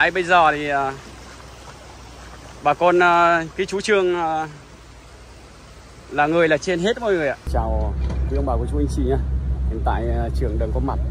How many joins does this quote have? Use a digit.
1